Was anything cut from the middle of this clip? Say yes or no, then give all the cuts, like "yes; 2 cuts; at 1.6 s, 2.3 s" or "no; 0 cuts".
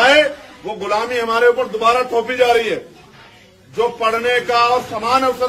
no; 0 cuts